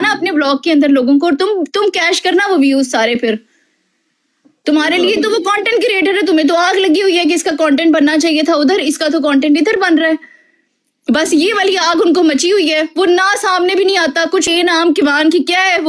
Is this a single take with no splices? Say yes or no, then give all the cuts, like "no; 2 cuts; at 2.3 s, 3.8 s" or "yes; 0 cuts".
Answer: no; 1 cut; at 14.4 s